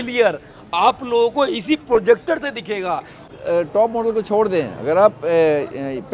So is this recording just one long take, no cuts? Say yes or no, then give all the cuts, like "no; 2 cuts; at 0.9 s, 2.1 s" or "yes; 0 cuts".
no; 1 cut; at 3.3 s